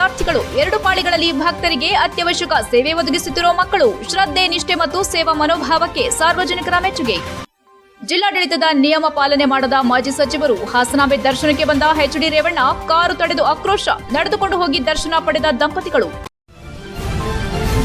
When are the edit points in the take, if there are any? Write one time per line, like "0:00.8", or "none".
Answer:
0:16.2